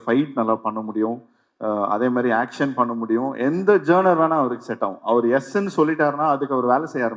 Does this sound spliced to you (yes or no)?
no